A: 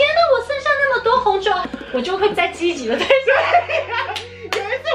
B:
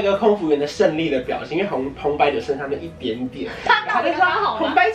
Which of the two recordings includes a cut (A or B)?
A